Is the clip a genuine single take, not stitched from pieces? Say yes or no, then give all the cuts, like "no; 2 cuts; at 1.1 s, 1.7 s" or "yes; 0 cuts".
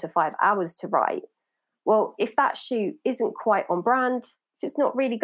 yes; 0 cuts